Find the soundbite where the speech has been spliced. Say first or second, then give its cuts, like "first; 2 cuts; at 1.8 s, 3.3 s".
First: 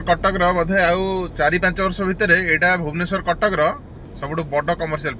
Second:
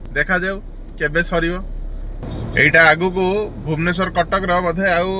second; 1 cut; at 2.1 s